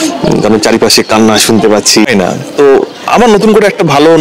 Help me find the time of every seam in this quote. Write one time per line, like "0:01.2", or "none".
0:02.1

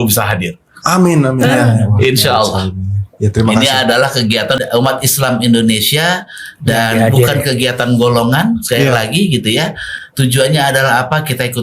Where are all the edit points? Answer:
0:04.6

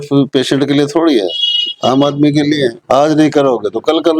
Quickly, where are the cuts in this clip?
none

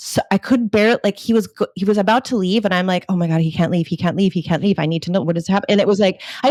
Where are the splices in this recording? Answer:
none

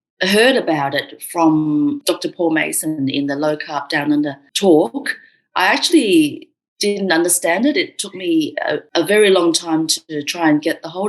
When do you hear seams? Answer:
0:02.0
0:04.4
0:08.8

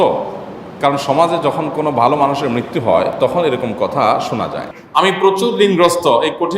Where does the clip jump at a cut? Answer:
0:04.6

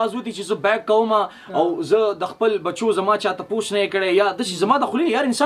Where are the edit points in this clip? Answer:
none

